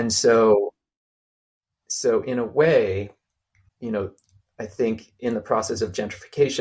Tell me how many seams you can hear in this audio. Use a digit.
1